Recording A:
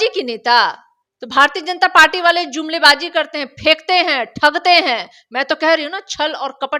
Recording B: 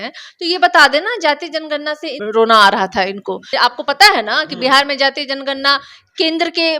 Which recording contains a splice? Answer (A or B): B